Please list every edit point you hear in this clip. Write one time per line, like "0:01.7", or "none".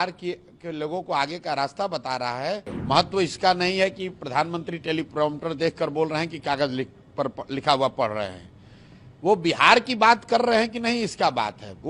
0:02.7